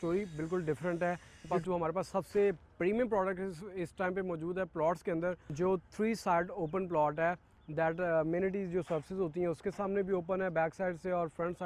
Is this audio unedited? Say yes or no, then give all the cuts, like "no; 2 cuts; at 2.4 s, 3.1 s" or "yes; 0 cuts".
no; 2 cuts; at 1.5 s, 5.4 s